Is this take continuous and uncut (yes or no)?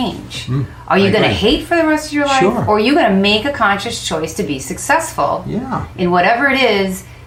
yes